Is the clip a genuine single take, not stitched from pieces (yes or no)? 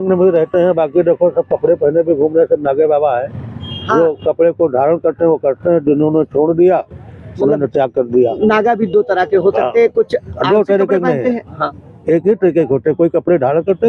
yes